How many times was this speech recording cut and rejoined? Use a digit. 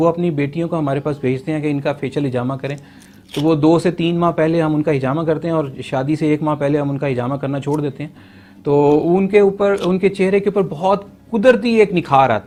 0